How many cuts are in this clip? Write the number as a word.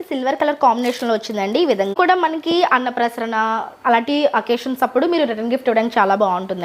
one